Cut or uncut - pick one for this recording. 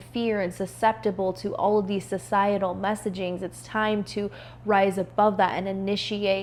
uncut